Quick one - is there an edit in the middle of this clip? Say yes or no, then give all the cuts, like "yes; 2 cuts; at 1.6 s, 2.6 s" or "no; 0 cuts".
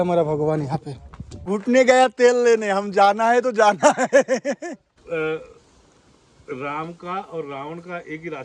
yes; 2 cuts; at 1.5 s, 5.0 s